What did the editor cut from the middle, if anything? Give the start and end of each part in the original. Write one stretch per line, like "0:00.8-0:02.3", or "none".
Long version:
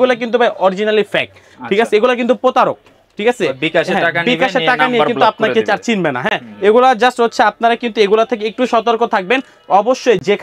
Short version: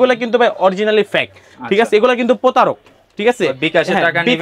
none